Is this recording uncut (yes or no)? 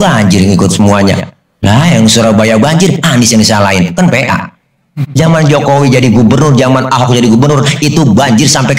yes